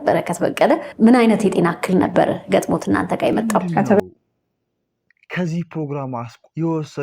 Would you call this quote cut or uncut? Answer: cut